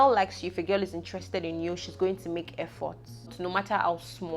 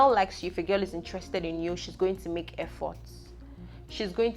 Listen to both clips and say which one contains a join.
first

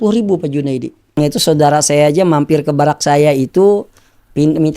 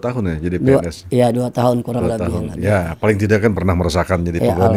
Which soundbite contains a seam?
first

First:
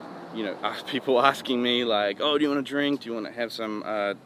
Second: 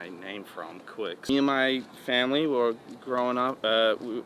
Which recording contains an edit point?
second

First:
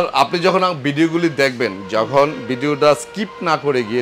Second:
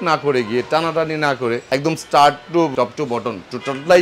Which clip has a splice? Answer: second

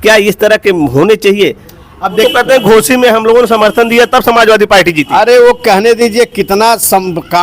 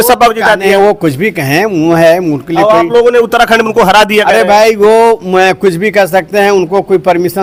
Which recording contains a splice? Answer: first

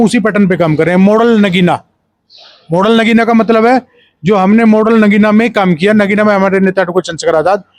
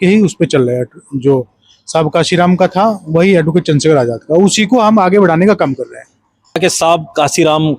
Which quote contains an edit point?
second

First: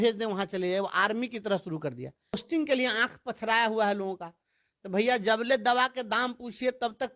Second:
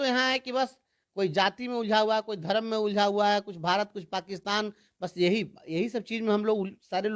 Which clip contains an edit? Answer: first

